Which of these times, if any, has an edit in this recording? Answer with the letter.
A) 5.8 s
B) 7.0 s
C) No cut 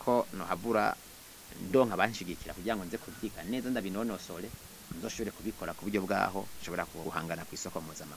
B